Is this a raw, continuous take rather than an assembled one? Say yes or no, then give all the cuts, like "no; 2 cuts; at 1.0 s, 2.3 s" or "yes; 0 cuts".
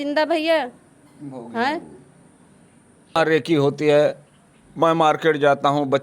no; 1 cut; at 3.1 s